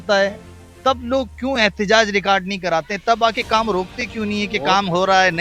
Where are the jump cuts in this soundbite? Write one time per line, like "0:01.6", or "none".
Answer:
none